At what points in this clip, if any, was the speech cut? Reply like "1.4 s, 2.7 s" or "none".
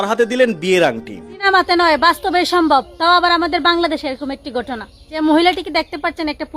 1.4 s, 5.2 s